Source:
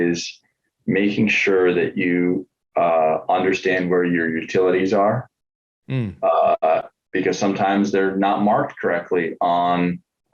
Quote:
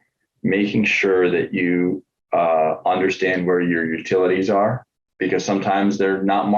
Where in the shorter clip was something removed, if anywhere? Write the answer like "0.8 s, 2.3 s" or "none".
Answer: 5.0 s